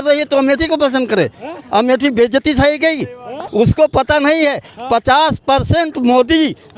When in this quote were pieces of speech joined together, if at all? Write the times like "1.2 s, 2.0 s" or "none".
3.4 s